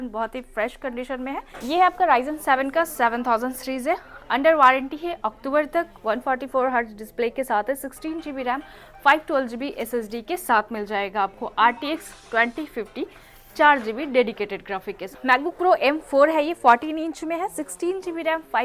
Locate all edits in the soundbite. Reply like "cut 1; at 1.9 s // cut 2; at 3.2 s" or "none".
cut 1; at 1.5 s // cut 2; at 15.0 s